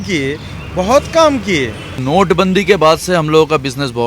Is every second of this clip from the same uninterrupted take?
no; 1 cut; at 2.0 s

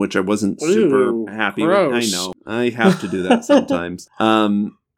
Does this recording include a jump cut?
yes; 2 cuts; at 2.2 s, 4.0 s

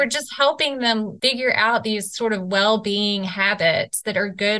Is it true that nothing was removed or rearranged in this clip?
no; 1 cut; at 1.1 s

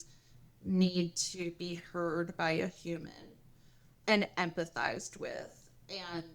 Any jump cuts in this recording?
yes; 1 cut; at 4.0 s

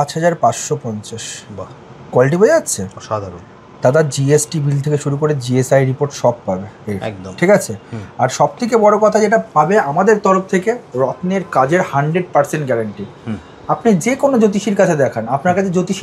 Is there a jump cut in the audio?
no; 0 cuts

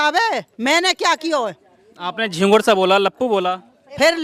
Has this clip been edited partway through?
no; 0 cuts

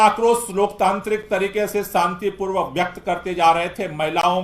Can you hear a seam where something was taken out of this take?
no; 0 cuts

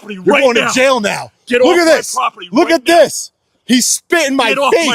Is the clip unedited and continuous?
yes; 0 cuts

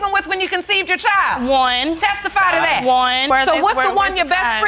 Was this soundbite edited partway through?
no; 0 cuts

